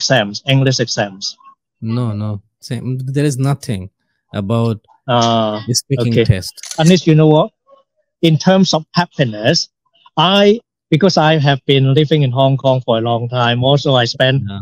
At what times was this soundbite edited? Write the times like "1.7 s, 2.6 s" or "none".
2.6 s, 6.7 s

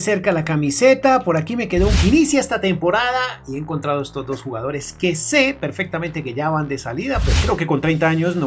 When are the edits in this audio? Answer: 2.0 s, 7.3 s

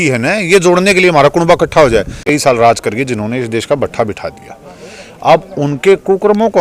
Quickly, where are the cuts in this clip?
2.2 s

